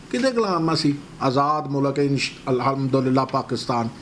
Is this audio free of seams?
yes; 0 cuts

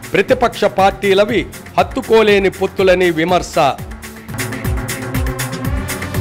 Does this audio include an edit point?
no; 0 cuts

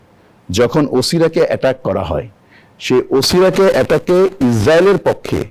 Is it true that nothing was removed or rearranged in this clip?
yes; 0 cuts

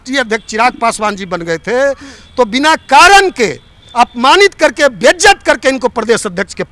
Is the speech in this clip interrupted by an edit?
no; 0 cuts

